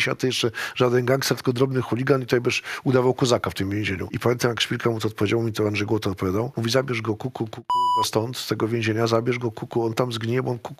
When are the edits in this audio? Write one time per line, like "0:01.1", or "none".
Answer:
0:04.1
0:06.5